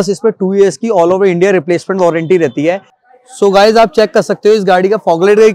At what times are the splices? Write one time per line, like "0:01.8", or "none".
0:02.9